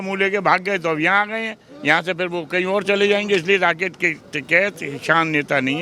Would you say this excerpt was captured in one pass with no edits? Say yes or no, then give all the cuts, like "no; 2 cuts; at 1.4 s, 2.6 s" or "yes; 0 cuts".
yes; 0 cuts